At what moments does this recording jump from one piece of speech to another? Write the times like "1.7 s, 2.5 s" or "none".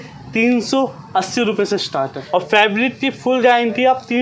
2.2 s